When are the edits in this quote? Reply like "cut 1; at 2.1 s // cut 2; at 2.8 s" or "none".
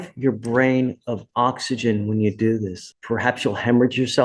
cut 1; at 2.8 s